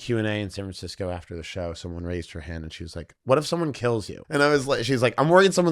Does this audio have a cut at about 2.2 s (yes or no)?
no